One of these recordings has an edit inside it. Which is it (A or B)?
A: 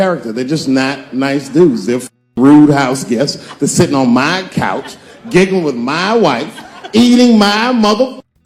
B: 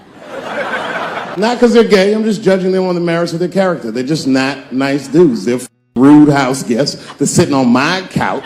B